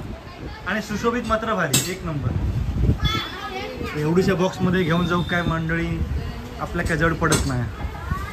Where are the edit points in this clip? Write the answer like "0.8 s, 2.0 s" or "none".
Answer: none